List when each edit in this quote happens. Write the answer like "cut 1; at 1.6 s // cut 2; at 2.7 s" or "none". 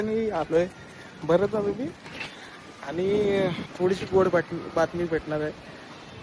cut 1; at 3.6 s